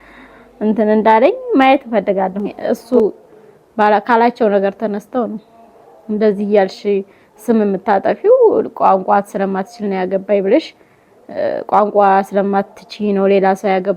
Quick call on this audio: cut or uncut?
cut